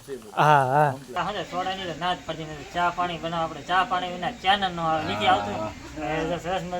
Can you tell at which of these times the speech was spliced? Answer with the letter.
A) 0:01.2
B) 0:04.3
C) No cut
A